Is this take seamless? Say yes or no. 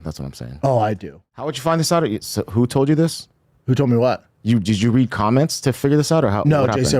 no